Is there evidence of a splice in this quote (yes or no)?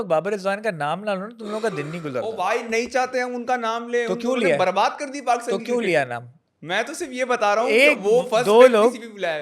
no